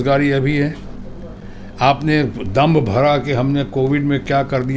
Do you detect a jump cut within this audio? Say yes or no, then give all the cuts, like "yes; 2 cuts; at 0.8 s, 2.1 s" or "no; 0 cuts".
no; 0 cuts